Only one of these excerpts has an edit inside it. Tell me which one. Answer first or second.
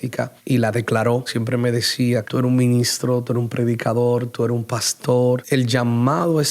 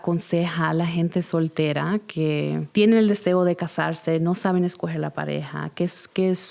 first